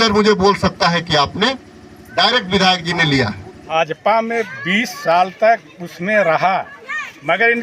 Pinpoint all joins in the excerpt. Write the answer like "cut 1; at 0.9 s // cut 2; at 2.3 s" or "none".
cut 1; at 3.5 s

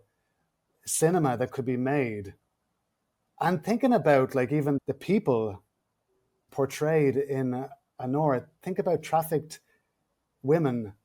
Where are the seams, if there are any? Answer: none

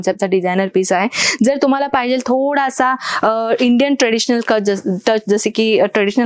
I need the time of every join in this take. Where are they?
none

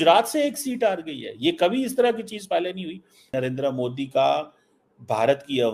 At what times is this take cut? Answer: cut 1; at 3.3 s

